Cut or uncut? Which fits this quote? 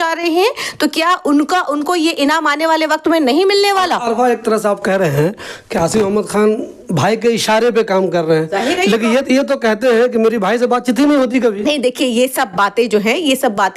uncut